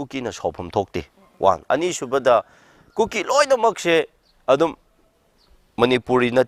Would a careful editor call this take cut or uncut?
uncut